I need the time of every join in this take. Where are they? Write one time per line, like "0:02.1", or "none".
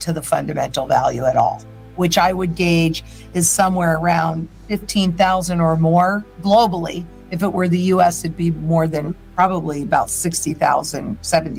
none